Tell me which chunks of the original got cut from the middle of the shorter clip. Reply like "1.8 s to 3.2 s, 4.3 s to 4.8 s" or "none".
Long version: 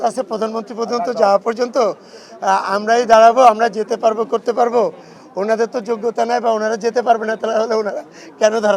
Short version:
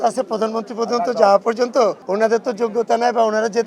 2.0 s to 5.3 s